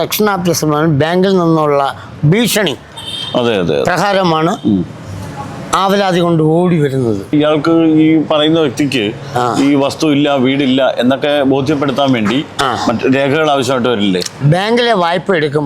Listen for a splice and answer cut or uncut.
cut